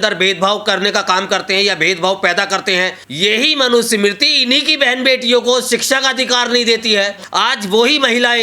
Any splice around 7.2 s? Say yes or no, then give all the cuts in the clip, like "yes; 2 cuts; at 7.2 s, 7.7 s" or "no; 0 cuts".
yes; 2 cuts; at 3.0 s, 7.2 s